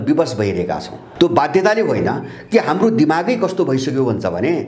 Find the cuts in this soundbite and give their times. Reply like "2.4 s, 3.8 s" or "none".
1.0 s